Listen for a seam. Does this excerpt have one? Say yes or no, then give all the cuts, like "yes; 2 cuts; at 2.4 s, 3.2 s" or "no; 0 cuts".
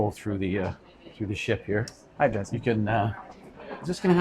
no; 0 cuts